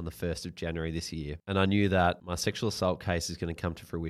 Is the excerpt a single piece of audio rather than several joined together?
no; 2 cuts; at 1.4 s, 2.3 s

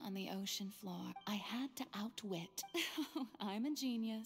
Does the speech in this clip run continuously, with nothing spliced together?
no; 2 cuts; at 1.2 s, 2.6 s

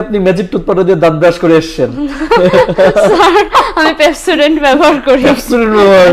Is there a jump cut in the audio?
no; 0 cuts

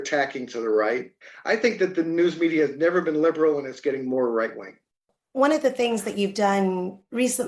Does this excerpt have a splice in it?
no; 0 cuts

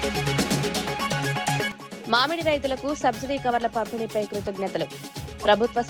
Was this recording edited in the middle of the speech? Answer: yes; 1 cut; at 1.8 s

